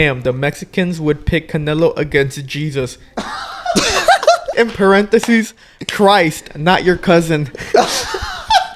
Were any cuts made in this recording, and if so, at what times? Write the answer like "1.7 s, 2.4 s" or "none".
4.5 s